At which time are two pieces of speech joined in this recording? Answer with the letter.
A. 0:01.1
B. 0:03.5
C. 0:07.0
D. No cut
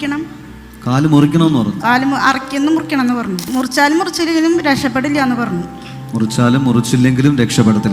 B